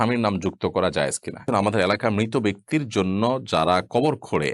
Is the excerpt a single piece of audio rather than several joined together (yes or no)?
no